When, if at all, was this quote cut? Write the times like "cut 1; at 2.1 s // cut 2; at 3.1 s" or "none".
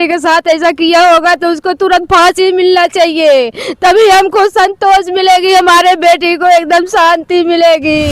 none